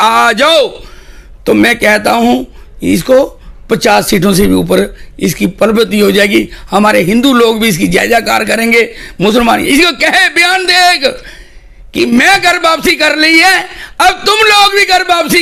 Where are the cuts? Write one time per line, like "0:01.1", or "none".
none